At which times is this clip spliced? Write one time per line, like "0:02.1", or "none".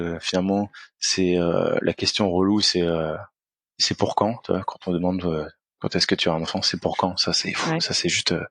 none